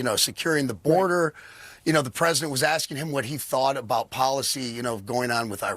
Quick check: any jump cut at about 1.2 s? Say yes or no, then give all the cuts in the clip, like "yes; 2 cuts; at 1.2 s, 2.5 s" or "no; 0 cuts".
yes; 1 cut; at 1.2 s